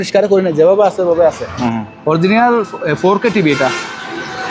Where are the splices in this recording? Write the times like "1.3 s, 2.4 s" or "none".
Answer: 1.5 s

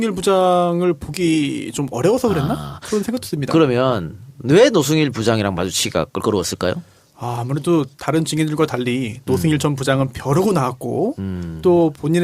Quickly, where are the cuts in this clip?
10.2 s

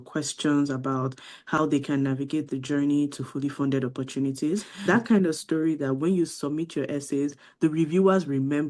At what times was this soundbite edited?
4.7 s

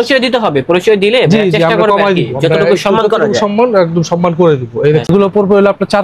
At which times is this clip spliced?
5.1 s

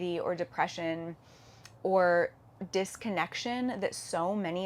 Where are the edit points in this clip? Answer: 2.5 s

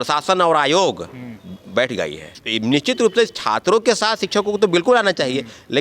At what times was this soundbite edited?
2.4 s

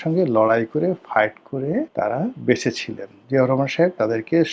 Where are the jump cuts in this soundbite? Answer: 1.9 s

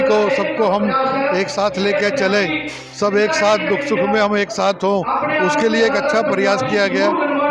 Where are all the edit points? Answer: none

